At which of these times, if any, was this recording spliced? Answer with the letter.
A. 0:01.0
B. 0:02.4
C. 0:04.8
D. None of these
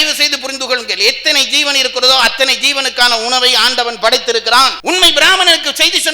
C